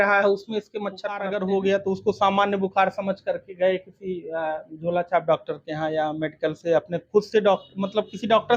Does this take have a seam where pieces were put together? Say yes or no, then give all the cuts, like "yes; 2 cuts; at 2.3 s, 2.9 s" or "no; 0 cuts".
yes; 1 cut; at 1.2 s